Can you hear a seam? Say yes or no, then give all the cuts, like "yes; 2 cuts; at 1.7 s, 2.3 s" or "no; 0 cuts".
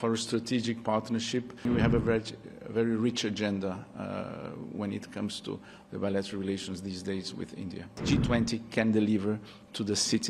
yes; 2 cuts; at 1.6 s, 7.9 s